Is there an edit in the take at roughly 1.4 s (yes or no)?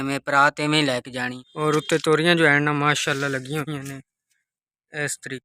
yes